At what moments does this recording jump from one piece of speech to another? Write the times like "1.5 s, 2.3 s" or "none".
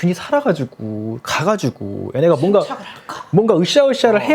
none